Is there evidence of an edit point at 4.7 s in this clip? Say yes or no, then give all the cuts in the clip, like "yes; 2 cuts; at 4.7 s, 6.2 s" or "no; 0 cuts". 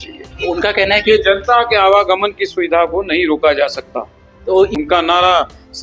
yes; 1 cut; at 4.7 s